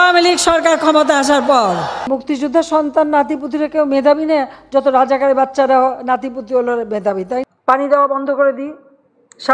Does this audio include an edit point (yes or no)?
yes